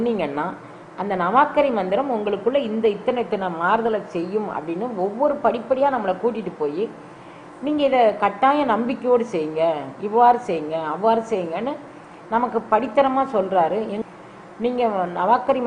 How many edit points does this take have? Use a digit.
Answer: 0